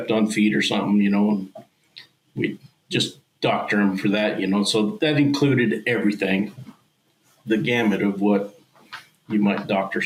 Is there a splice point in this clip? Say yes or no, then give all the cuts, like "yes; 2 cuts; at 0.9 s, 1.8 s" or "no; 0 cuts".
no; 0 cuts